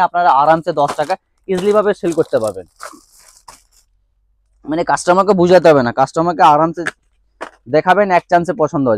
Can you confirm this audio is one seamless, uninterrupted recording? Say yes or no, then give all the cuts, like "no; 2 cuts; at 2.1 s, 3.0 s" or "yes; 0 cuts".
yes; 0 cuts